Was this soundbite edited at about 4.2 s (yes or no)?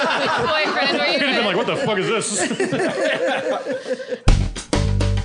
yes